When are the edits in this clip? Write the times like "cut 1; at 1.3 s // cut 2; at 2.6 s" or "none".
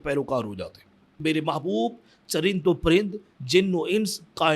cut 1; at 1.2 s

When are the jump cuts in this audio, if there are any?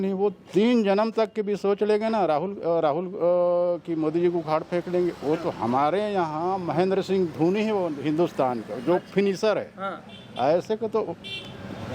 none

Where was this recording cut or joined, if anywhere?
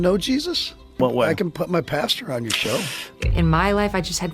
cut 1; at 1.0 s // cut 2; at 3.2 s

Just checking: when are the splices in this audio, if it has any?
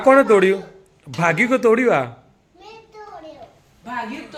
none

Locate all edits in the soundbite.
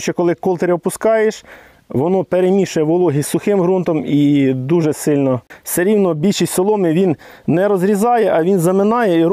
cut 1; at 5.6 s

